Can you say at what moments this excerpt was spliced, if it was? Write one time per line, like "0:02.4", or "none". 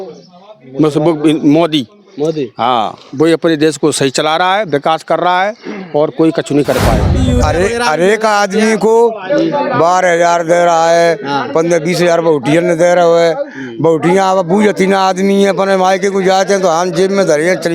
0:07.2